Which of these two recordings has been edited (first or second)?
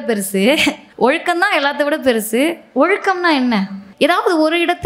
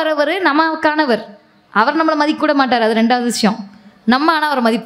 first